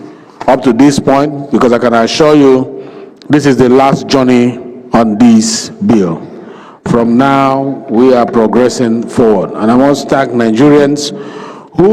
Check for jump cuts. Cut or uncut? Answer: uncut